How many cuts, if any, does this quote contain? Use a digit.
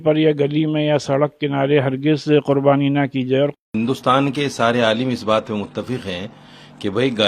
1